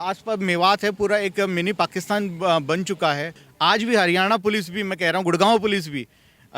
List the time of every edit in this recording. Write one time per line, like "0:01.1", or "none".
0:03.4